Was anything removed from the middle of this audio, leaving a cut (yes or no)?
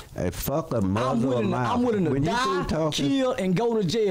no